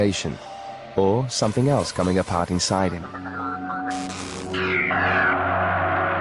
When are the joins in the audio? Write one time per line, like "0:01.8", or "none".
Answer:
none